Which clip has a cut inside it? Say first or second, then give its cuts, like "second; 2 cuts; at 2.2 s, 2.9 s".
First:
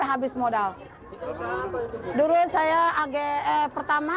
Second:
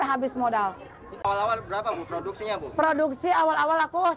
second; 1 cut; at 1.2 s